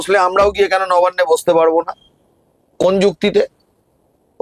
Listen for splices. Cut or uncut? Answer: uncut